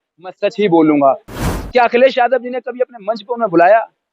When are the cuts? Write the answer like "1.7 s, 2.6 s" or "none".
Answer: 1.4 s